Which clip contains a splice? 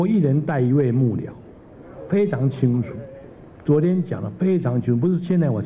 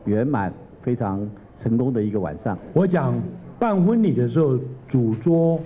second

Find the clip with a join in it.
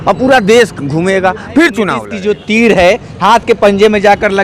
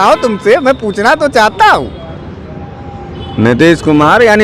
first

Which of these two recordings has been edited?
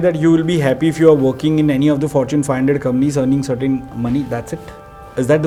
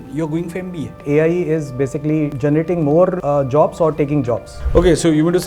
second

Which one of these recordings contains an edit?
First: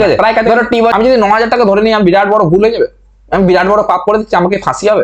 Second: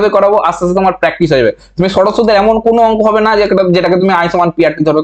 first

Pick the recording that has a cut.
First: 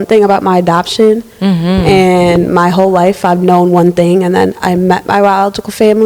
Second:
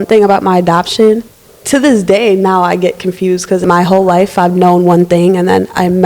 second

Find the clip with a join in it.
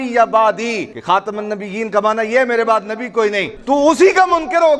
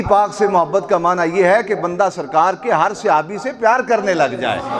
first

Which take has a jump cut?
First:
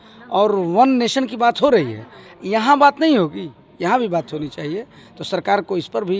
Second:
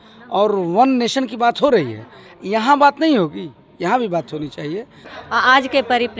second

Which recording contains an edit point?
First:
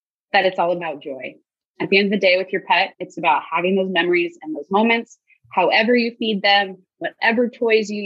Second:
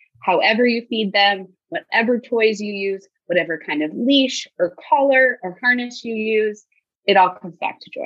second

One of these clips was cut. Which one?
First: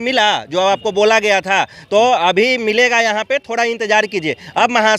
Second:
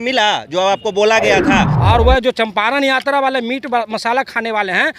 second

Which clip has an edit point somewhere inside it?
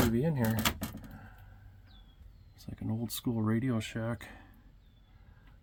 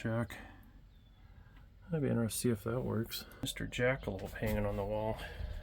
second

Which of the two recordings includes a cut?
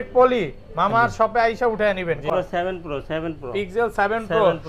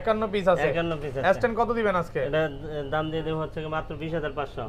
first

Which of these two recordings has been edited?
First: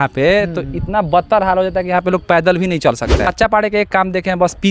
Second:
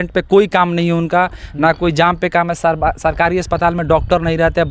first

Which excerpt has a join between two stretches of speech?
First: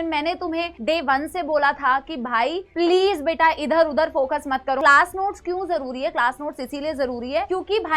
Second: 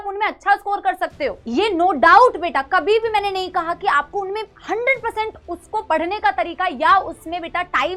first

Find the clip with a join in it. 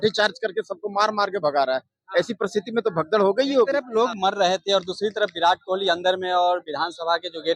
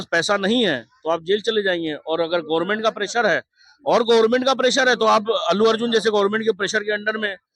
first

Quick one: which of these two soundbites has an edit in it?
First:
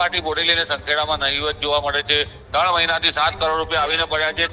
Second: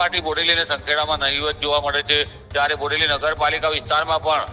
first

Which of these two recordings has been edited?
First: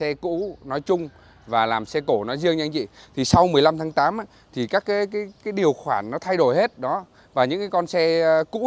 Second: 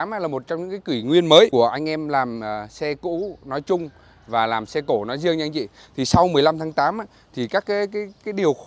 second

